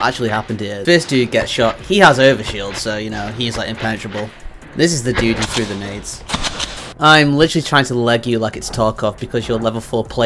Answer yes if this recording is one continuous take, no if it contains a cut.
yes